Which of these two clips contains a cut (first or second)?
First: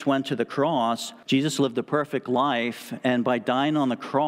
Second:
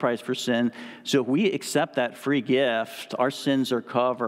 first